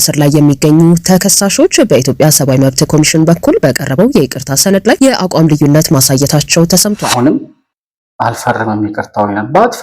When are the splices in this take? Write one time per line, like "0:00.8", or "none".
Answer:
0:07.0